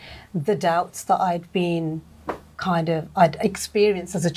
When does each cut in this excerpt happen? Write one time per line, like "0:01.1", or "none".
none